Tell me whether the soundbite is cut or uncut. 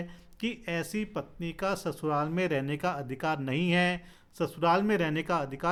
uncut